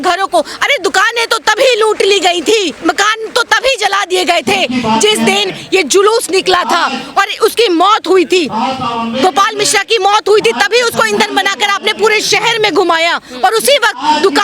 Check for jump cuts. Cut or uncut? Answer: uncut